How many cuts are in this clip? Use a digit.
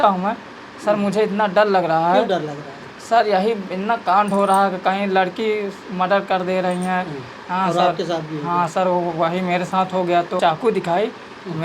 1